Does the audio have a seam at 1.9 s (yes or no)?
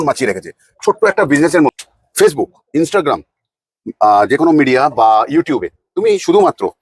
yes